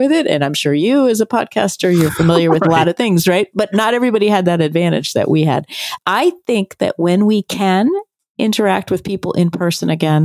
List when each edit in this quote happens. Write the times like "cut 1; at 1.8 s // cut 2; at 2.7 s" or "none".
cut 1; at 5.8 s